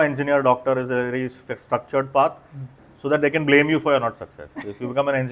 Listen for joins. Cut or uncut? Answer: uncut